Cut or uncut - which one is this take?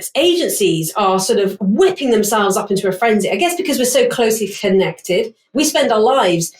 cut